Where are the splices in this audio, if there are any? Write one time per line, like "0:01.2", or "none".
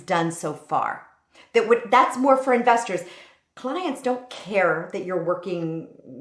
none